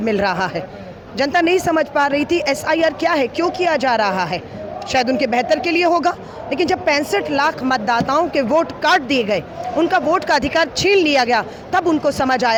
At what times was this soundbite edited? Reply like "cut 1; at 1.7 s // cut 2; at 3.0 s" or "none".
none